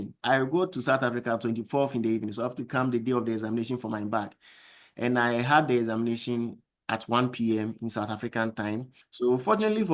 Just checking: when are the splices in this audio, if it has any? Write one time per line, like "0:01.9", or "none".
0:09.0